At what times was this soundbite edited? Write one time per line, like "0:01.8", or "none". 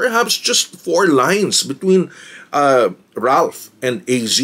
none